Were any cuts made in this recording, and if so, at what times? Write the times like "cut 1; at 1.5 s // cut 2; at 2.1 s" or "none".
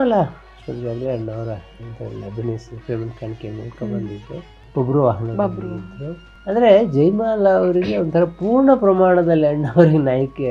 none